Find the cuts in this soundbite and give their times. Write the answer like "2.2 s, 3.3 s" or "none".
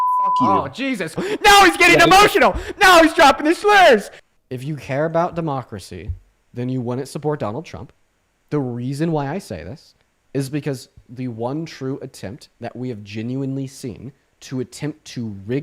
1.2 s, 4.2 s